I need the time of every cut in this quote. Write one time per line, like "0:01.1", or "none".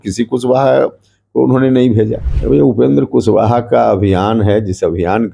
0:02.3